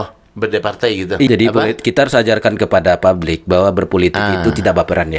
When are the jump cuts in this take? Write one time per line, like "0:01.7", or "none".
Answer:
0:01.3